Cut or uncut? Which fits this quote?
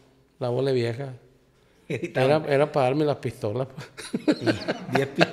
uncut